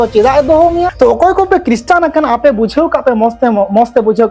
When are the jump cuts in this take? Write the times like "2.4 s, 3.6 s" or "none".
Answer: 0.9 s